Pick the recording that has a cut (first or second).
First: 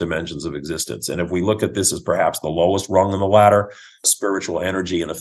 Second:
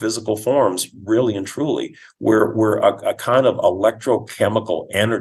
first